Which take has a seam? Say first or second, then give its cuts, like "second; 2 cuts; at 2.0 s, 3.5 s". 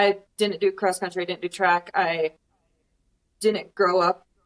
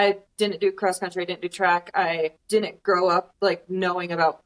second; 2 cuts; at 2.4 s, 3.3 s